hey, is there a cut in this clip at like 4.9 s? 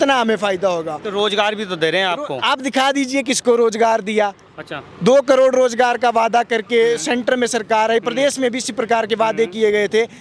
no; 0 cuts

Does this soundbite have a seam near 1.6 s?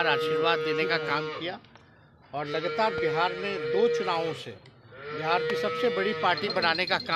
no; 0 cuts

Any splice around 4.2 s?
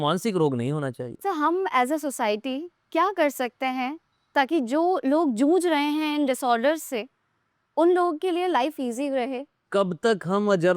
no; 2 cuts; at 1.1 s, 9.5 s

